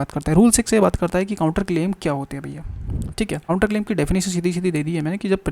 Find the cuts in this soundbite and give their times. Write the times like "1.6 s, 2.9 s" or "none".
3.4 s